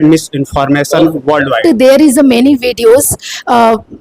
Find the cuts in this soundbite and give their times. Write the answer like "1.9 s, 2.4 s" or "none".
1.6 s